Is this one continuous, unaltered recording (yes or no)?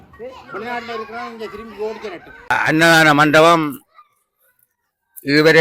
no